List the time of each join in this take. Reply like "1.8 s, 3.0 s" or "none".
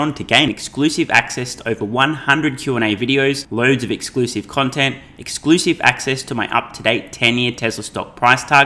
none